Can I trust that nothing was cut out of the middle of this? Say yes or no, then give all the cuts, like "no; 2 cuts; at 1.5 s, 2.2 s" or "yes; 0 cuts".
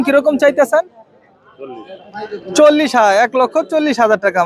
yes; 0 cuts